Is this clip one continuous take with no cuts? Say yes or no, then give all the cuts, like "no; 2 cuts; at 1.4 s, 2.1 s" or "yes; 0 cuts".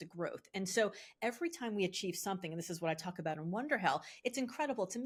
yes; 0 cuts